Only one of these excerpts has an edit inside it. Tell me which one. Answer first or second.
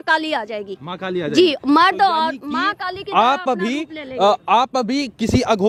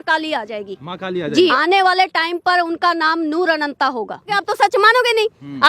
second